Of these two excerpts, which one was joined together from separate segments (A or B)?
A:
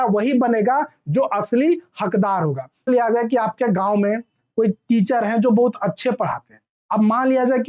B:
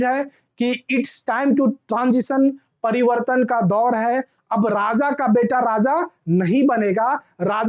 A